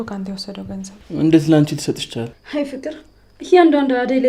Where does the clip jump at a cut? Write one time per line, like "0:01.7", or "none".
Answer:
0:00.9
0:02.4